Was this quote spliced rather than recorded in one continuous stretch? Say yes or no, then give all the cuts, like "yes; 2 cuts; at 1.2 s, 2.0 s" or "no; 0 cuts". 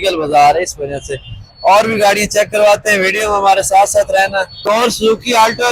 no; 0 cuts